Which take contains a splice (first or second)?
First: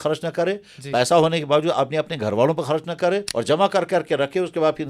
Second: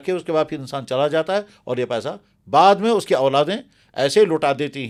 first